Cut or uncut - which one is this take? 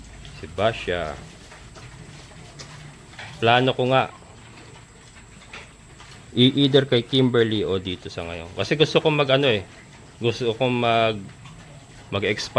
uncut